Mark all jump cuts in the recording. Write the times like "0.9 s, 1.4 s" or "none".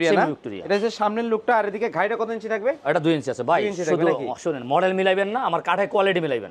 none